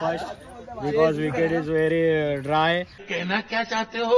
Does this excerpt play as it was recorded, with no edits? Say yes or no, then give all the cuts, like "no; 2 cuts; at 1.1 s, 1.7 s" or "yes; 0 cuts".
yes; 0 cuts